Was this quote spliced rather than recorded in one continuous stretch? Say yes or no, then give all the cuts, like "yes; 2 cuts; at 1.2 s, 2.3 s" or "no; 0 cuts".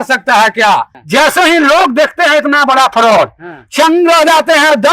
yes; 1 cut; at 1.0 s